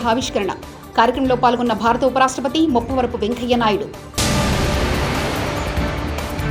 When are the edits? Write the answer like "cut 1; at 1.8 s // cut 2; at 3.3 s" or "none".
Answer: none